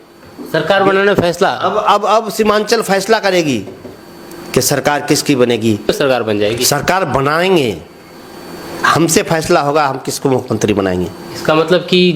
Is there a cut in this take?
no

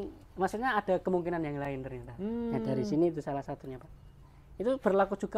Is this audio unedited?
yes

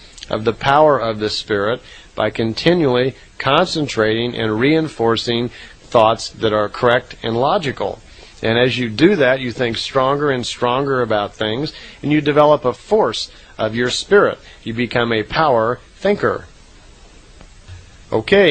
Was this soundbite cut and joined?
no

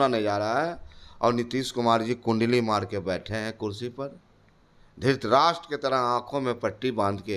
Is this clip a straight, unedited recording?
yes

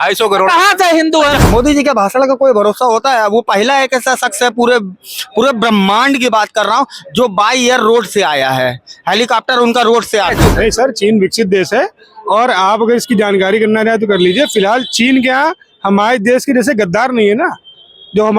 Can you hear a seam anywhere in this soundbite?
yes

